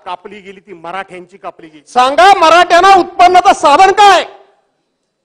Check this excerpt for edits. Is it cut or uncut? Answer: cut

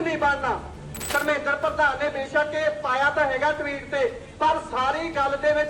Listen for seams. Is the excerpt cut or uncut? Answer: cut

